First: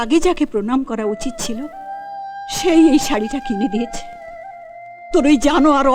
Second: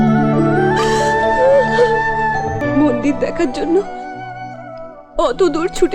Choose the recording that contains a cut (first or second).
second